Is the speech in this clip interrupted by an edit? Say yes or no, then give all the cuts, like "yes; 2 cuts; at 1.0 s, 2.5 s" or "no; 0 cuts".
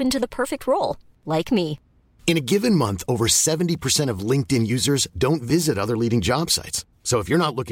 no; 0 cuts